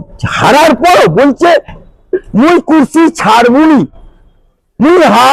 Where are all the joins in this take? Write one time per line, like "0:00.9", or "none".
none